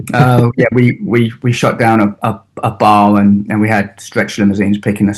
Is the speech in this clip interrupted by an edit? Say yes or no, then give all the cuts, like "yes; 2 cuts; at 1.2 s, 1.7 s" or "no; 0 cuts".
no; 0 cuts